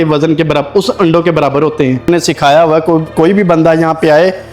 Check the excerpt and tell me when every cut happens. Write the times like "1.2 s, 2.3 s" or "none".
2.1 s